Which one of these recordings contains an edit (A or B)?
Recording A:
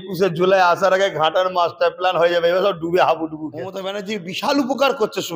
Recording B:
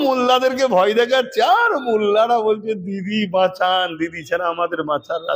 A